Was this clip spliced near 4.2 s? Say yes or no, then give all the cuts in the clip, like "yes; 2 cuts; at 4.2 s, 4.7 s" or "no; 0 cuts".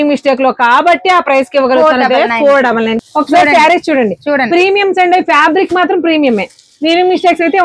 no; 1 cut; at 3.0 s